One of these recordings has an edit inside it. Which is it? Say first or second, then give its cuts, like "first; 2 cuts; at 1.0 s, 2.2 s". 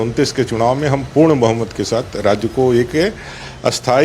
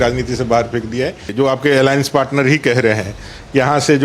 second; 1 cut; at 1.3 s